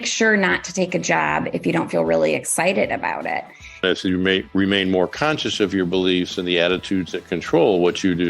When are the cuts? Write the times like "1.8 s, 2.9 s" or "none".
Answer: 3.8 s